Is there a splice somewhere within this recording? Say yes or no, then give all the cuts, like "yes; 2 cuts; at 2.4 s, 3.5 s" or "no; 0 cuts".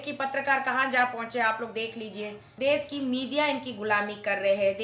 yes; 1 cut; at 2.4 s